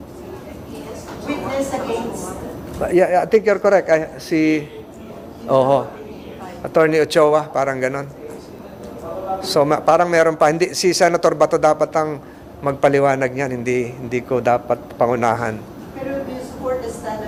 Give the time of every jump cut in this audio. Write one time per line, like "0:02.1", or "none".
none